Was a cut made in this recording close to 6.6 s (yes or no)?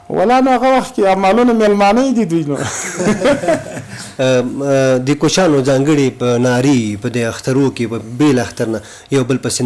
no